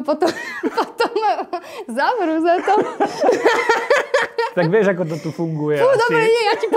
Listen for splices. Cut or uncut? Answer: uncut